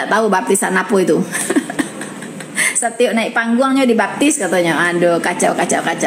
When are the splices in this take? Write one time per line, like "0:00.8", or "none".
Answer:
none